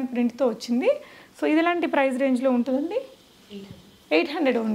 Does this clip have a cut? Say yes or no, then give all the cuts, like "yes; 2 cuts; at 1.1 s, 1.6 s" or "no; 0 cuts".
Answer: no; 0 cuts